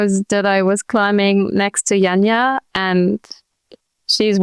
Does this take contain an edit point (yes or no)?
no